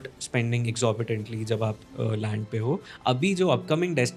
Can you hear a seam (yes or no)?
yes